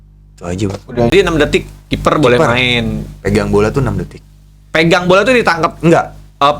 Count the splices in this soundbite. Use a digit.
1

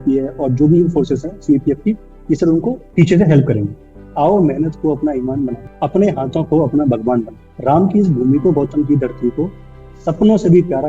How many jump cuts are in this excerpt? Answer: 4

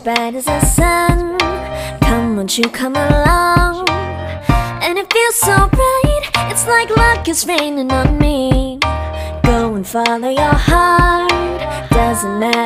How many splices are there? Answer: 0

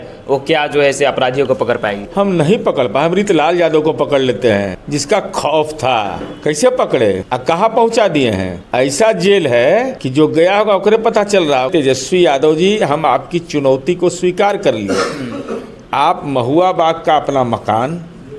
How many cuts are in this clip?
7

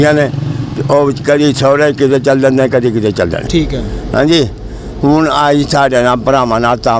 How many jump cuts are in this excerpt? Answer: 1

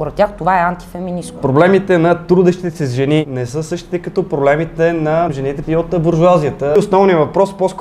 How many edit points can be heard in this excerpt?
4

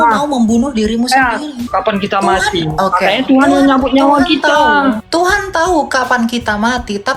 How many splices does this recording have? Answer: 2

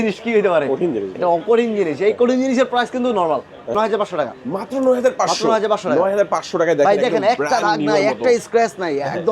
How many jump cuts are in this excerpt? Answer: 1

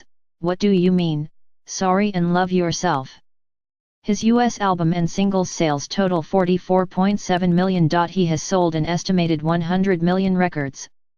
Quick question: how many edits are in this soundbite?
0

